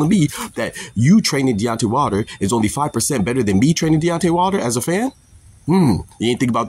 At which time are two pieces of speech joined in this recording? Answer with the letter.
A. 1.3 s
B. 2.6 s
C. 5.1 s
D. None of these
C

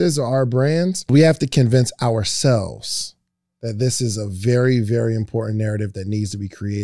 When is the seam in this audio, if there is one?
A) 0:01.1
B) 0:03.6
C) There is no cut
A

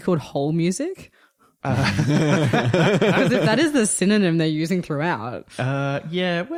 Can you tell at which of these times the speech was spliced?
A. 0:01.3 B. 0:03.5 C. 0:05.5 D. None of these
D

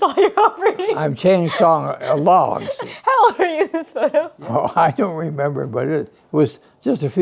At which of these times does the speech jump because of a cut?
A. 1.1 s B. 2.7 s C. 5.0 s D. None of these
B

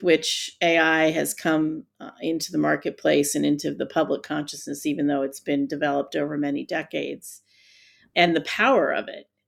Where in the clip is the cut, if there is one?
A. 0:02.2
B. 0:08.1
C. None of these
B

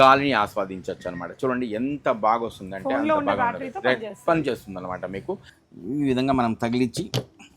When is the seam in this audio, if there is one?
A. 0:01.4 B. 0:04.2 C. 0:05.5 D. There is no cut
C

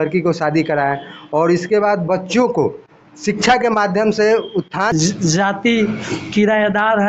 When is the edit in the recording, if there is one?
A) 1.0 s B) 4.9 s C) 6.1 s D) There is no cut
B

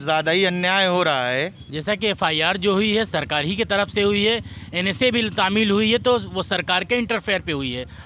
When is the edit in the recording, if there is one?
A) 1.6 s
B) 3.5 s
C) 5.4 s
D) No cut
A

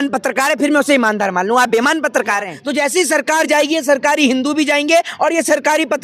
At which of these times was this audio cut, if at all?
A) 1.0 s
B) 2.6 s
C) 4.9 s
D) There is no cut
B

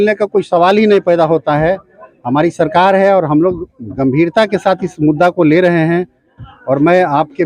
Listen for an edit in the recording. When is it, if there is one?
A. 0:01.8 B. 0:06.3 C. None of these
C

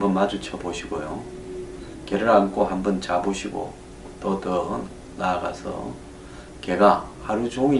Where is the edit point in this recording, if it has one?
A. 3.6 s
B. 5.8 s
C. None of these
B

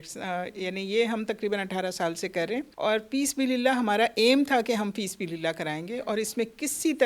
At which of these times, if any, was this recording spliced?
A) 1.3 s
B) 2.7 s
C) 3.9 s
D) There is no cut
B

